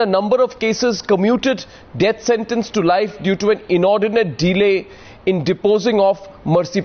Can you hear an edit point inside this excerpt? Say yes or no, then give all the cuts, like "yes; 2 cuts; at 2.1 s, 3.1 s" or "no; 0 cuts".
yes; 1 cut; at 5.2 s